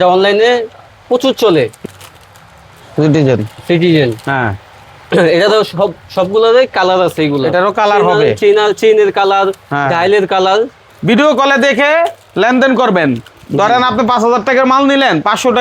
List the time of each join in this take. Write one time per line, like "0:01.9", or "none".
0:01.8
0:10.9